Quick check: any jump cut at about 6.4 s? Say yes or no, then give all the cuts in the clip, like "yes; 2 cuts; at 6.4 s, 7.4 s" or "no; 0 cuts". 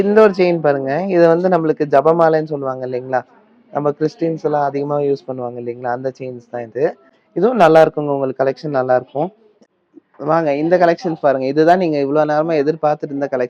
no; 0 cuts